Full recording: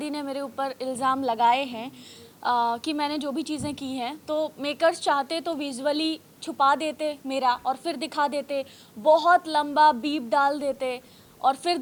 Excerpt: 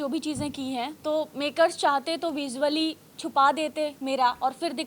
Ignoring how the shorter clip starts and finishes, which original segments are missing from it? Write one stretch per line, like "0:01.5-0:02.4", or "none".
none

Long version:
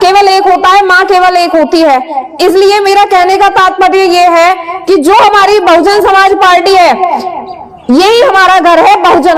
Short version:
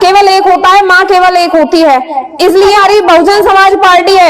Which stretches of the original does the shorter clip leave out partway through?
0:02.8-0:05.4

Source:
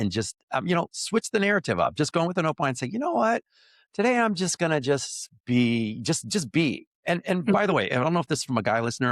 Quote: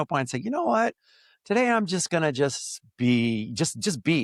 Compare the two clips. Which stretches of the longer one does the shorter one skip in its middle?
none

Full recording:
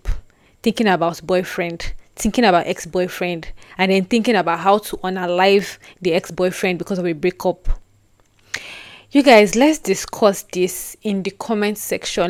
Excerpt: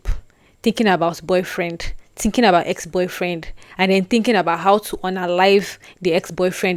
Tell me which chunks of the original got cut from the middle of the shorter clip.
none

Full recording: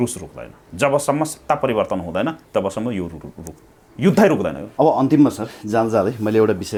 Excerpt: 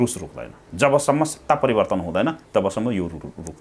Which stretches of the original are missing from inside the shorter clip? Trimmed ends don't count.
none

